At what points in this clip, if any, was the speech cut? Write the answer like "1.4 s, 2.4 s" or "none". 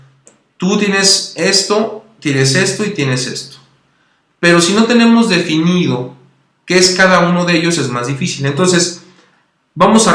3.0 s